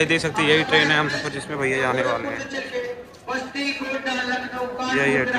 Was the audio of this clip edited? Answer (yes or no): no